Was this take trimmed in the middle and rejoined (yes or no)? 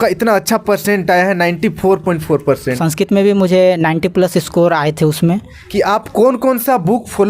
yes